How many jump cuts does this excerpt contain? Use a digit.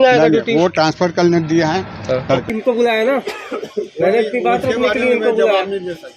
1